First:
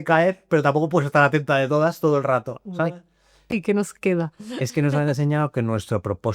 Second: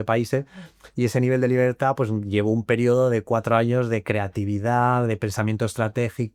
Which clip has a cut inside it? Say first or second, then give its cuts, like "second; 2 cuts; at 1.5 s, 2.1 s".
first; 1 cut; at 3.5 s